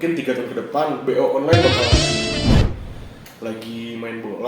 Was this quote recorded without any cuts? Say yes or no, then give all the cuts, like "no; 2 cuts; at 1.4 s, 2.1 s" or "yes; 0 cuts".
no; 1 cut; at 2.6 s